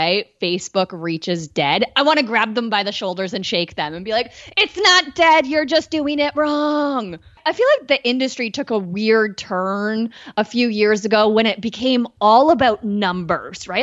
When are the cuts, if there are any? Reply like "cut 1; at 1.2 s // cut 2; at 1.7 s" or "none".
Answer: cut 1; at 7.4 s